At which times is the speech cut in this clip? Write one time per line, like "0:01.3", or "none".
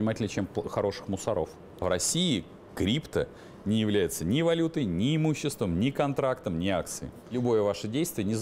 0:01.8
0:07.3